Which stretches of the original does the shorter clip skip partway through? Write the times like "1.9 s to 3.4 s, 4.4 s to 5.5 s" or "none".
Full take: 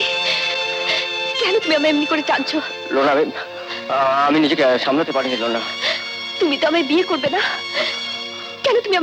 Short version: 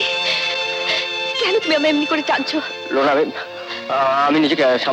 none